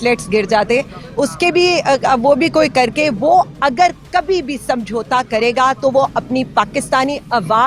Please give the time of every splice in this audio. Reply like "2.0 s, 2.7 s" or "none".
none